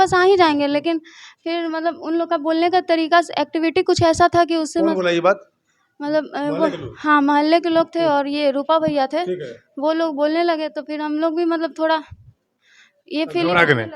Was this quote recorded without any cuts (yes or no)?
yes